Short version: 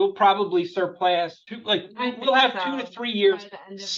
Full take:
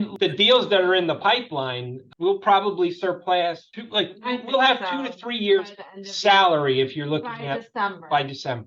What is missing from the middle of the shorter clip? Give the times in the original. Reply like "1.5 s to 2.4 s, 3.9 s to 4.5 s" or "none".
none